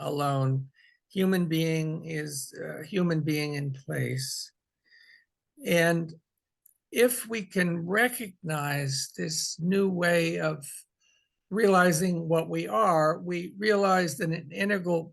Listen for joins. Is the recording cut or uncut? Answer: uncut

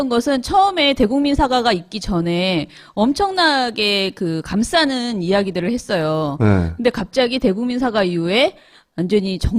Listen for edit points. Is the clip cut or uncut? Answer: cut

